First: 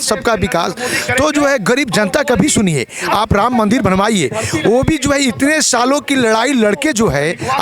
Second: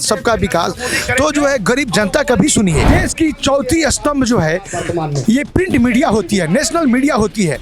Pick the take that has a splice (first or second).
second